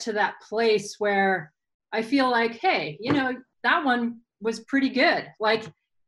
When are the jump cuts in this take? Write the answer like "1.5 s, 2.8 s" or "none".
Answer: 3.5 s